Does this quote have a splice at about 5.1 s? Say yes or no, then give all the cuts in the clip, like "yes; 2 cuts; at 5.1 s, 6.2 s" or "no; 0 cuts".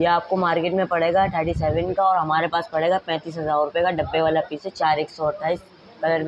no; 0 cuts